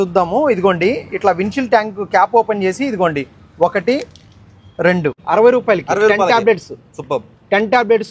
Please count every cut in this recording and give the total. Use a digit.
1